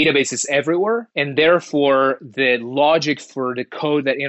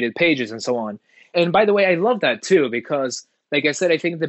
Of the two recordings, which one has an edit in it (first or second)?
first